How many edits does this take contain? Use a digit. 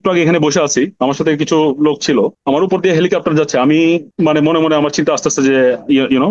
3